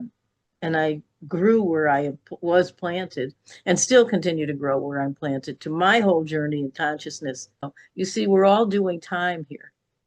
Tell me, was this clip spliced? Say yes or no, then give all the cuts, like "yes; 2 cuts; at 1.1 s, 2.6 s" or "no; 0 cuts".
yes; 1 cut; at 7.8 s